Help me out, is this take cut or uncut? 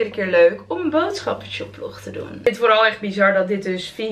cut